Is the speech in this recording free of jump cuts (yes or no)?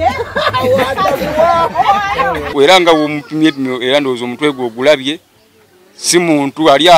no